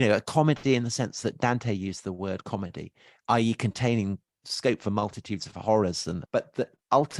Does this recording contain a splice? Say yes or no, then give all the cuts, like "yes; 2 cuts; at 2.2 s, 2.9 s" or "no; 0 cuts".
yes; 2 cuts; at 4.5 s, 6.2 s